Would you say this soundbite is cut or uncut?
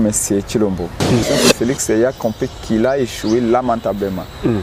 cut